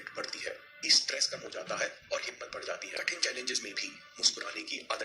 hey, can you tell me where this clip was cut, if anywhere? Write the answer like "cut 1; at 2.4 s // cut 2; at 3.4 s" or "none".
cut 1; at 0.8 s // cut 2; at 3.0 s

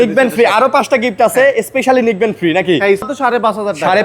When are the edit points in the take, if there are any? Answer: cut 1; at 3.1 s

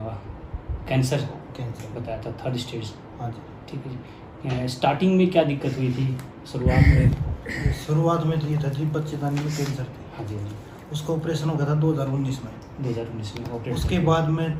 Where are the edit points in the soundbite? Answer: none

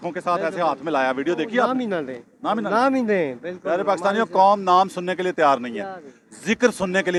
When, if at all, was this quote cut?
none

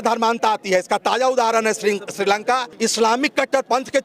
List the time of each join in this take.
cut 1; at 2.7 s

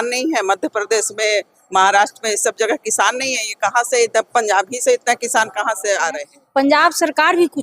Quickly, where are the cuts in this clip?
cut 1; at 6.3 s

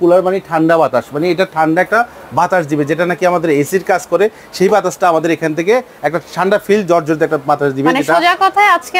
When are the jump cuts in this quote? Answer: none

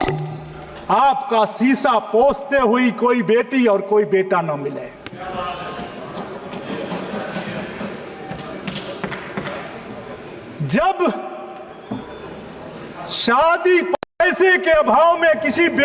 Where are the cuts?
none

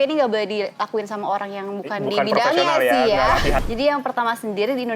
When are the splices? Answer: cut 1; at 3.6 s

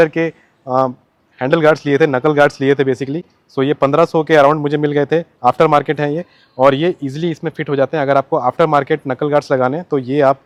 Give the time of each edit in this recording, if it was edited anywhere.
none

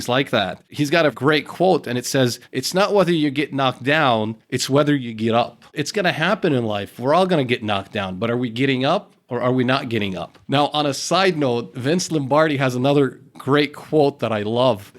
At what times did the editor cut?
cut 1; at 1.2 s // cut 2; at 5.7 s

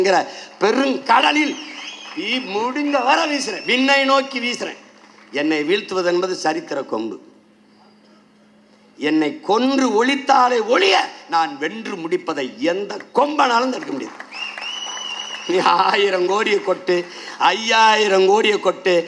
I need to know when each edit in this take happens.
none

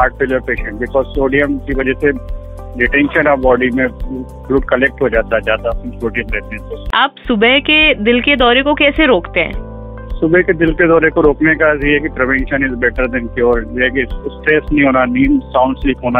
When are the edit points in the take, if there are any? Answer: none

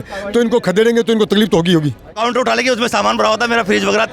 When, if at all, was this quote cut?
cut 1; at 2.2 s

